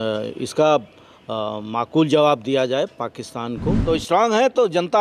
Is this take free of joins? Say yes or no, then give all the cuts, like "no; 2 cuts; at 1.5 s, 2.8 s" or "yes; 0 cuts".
no; 1 cut; at 3.7 s